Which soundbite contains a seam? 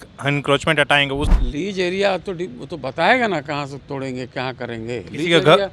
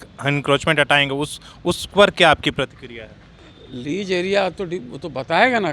first; 1 cut; at 1.4 s

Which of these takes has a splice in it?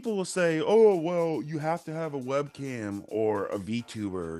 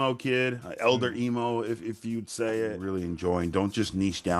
second; 1 cut; at 2.8 s

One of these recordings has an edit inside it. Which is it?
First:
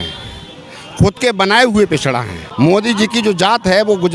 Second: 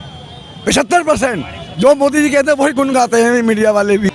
first; 1 cut; at 2.4 s

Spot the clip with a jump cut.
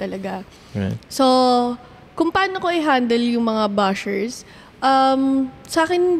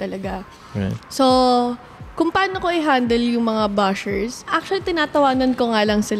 second; 1 cut; at 4.6 s

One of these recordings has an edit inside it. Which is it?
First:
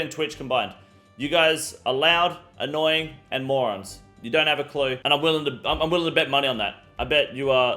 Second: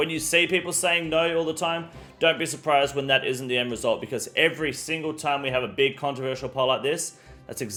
first; 1 cut; at 5.0 s

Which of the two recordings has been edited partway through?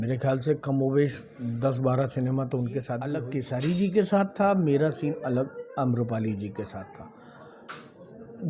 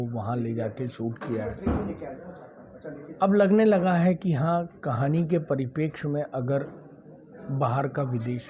first; 1 cut; at 3.2 s

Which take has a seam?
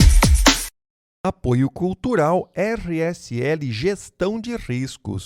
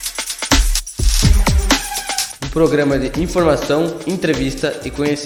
first; 1 cut; at 1.0 s

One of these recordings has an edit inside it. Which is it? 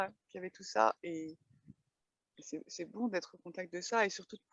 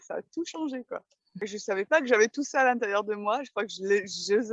second; 1 cut; at 1.4 s

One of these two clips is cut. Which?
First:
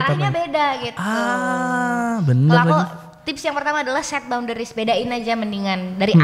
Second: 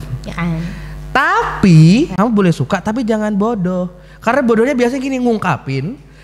second; 1 cut; at 2.1 s

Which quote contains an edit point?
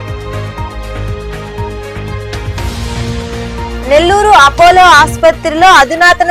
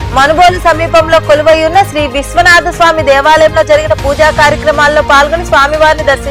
first; 1 cut; at 2.4 s

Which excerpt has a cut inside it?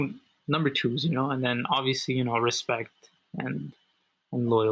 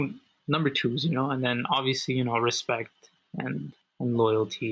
second; 1 cut; at 3.8 s

